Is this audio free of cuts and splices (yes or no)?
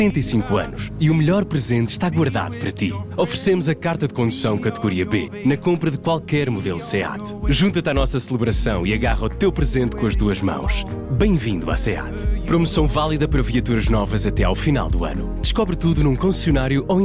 yes